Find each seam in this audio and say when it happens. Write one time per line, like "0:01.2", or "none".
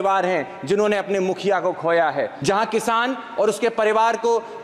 0:02.3